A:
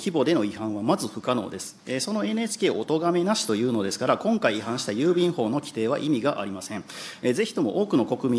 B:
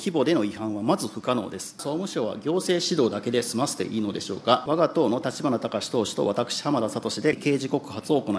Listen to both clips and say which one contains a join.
B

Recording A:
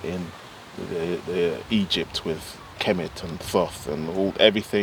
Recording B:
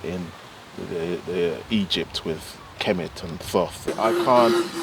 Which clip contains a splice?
B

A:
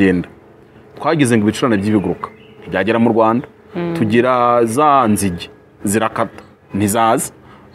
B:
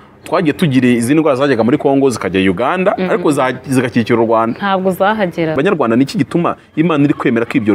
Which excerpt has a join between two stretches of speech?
B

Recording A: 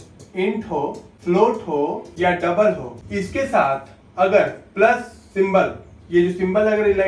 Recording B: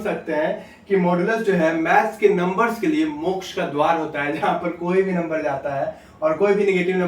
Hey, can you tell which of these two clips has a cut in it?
A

